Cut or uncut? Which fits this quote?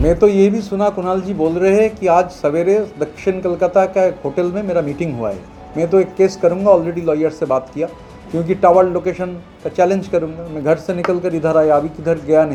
uncut